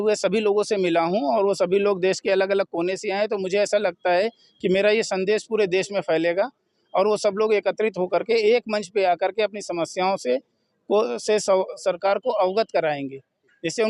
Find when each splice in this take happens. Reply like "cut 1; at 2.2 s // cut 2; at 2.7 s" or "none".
none